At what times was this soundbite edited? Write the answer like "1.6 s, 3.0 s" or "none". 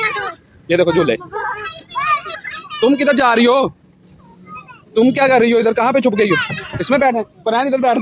none